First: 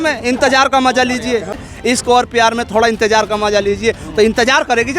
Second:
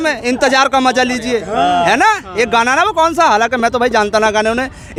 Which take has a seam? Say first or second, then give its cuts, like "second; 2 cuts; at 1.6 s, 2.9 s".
first; 1 cut; at 1.5 s